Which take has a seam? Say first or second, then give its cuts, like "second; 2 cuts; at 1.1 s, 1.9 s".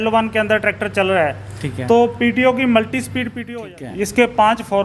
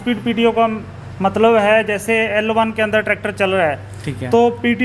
first; 1 cut; at 3.3 s